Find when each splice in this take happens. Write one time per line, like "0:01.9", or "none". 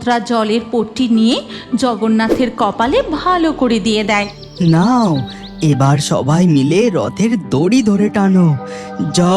0:04.4